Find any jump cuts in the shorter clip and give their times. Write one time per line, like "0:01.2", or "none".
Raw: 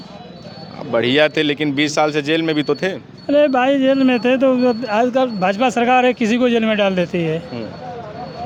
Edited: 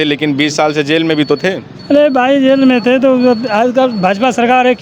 none